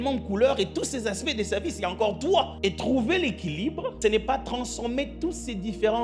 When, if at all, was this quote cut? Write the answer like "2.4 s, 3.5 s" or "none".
2.5 s, 4.0 s